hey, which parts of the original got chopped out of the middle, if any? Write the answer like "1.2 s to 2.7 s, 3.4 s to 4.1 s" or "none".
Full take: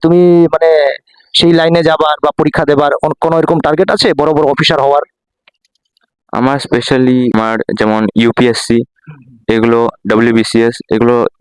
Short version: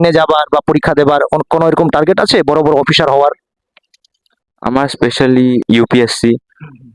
7.3 s to 8.1 s